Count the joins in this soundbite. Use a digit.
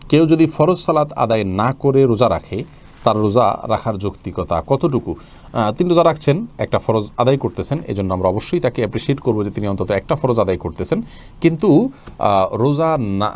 0